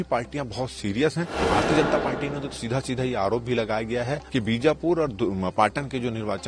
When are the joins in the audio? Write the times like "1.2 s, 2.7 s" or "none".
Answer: 1.4 s, 4.2 s